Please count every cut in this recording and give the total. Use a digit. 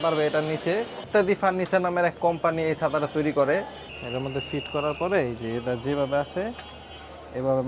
2